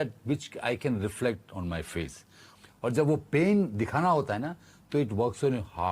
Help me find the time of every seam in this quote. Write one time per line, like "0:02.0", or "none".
0:02.5